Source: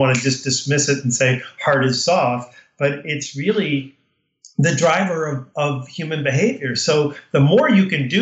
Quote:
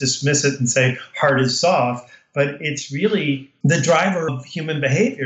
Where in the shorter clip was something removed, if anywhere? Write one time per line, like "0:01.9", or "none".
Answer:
0:03.5
0:04.3